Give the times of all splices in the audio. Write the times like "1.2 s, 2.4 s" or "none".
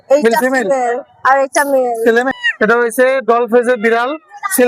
2.4 s